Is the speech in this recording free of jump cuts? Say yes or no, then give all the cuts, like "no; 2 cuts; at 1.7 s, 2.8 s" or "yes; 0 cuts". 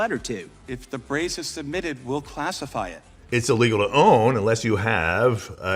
no; 1 cut; at 3.1 s